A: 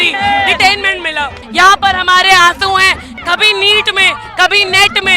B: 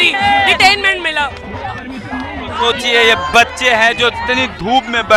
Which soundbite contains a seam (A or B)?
A